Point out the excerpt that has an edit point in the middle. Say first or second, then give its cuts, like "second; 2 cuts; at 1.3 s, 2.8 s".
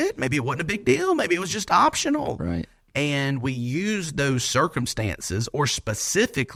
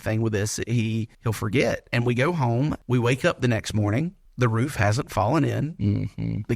second; 3 cuts; at 1.1 s, 2.8 s, 4.2 s